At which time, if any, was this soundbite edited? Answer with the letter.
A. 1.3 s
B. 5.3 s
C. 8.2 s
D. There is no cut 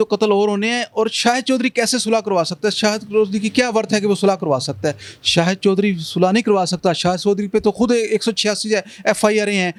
D